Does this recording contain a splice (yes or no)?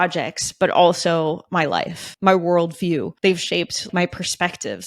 yes